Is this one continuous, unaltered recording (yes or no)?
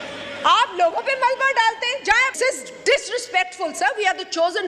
no